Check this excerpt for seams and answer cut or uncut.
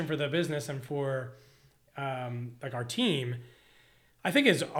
uncut